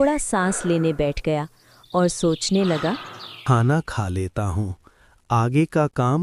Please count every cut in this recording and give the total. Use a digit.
0